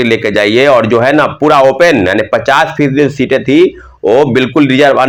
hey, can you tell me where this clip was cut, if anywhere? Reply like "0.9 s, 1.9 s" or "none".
none